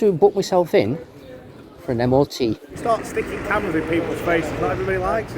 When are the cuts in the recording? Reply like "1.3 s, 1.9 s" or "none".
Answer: 2.7 s

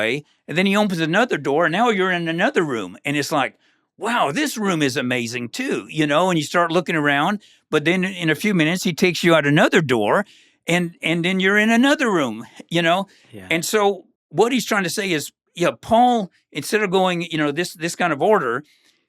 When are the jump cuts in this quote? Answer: 14.1 s

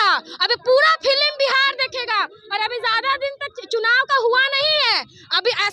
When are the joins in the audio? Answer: none

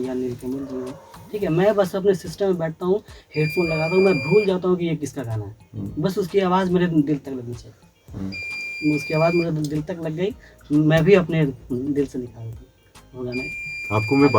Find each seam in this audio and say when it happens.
none

